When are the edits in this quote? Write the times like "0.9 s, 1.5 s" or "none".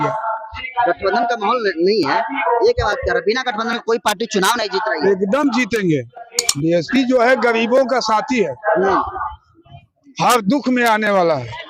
6.4 s